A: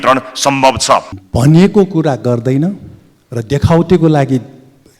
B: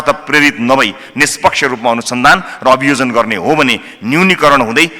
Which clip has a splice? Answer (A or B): A